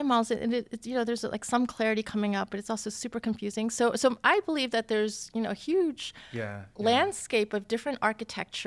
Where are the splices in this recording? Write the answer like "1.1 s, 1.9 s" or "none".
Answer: none